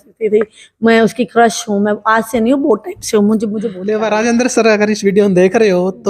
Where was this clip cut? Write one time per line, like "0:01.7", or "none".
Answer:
0:03.7